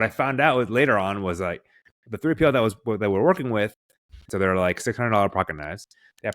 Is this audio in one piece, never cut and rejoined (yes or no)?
no